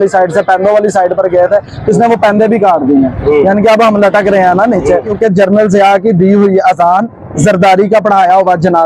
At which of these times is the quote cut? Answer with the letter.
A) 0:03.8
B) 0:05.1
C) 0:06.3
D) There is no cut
B